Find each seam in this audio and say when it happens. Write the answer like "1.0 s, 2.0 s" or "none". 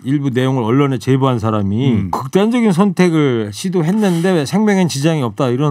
2.1 s